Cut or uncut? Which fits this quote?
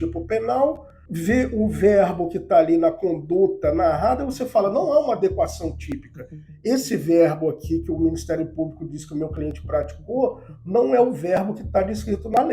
uncut